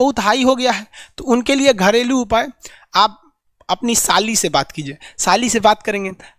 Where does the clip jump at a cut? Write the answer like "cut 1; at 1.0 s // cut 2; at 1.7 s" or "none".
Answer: none